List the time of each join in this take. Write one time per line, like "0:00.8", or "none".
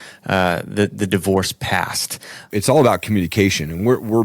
0:02.4